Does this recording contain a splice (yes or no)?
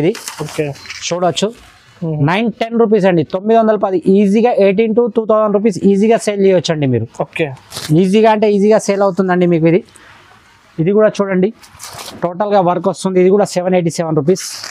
no